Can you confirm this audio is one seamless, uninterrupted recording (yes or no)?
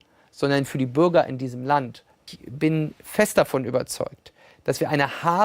no